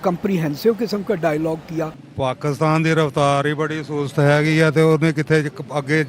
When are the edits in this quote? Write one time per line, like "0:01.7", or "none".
0:02.0